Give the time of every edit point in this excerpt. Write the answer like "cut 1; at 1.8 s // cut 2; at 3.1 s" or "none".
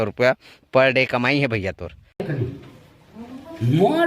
cut 1; at 2.2 s